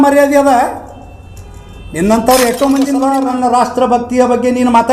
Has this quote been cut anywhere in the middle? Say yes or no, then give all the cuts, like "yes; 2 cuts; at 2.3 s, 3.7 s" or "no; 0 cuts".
yes; 1 cut; at 3.2 s